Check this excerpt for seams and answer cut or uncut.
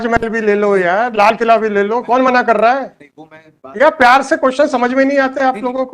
uncut